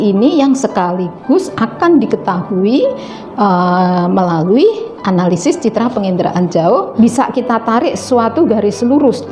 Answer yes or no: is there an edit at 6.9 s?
yes